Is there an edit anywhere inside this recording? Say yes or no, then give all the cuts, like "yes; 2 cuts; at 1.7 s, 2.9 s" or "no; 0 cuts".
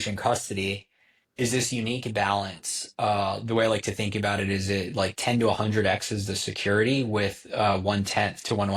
no; 0 cuts